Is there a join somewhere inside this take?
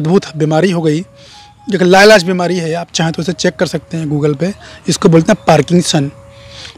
no; 0 cuts

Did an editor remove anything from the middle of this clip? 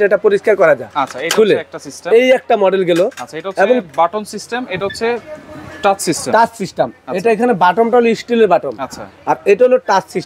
no; 0 cuts

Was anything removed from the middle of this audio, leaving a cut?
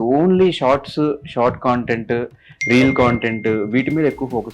no; 0 cuts

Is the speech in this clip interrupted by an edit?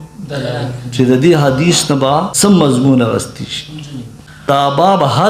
yes; 2 cuts; at 2.3 s, 4.5 s

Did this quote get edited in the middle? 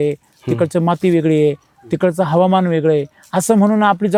no; 0 cuts

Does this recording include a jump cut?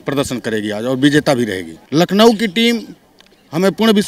no; 0 cuts

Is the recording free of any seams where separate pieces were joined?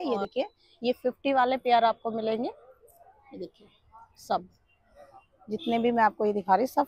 yes; 0 cuts

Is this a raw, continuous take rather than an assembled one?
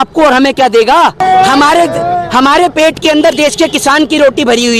no; 1 cut; at 1.2 s

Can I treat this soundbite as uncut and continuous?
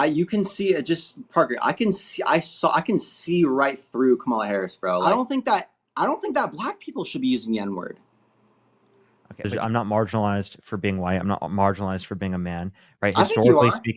no; 2 cuts; at 5.0 s, 9.4 s

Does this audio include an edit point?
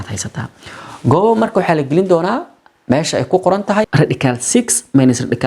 yes; 1 cut; at 3.9 s

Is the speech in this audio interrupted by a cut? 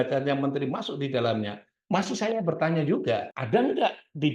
yes; 1 cut; at 3.3 s

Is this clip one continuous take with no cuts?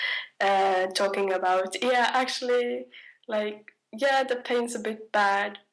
yes; 0 cuts

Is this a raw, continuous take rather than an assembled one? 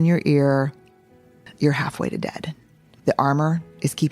no; 2 cuts; at 1.4 s, 2.9 s

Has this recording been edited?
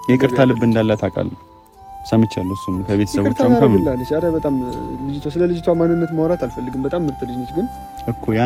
no; 0 cuts

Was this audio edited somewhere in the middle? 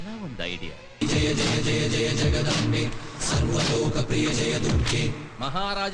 yes; 1 cut; at 1.0 s

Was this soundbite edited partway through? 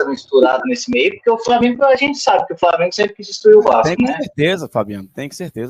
no; 0 cuts

